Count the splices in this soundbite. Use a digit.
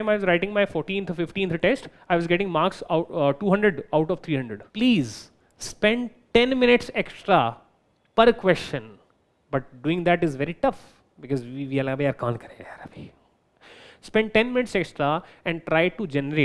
1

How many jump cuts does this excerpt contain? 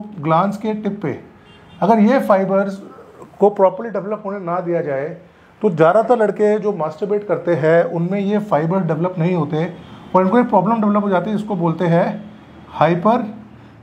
0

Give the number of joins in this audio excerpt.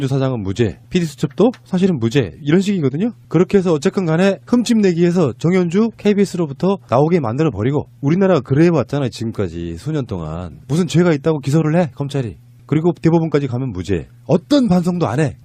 1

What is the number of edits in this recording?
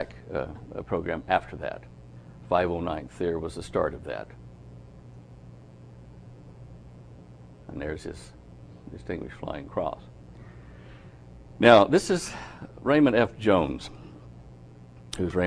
1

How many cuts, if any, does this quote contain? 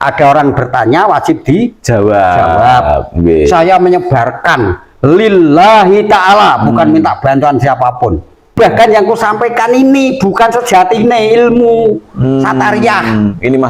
1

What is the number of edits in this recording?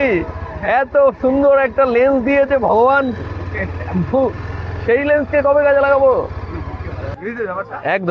1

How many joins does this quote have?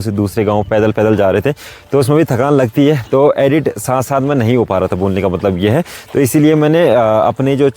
0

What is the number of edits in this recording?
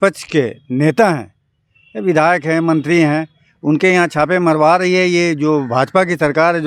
0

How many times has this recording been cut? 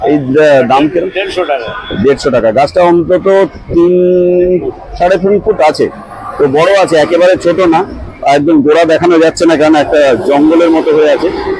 0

